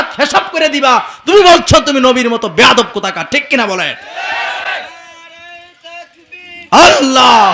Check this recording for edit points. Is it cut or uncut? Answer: uncut